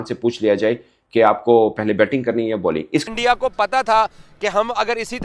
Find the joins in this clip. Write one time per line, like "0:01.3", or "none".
0:03.0